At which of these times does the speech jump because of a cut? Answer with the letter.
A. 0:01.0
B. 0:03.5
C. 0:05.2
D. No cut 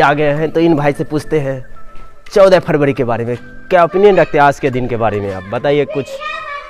A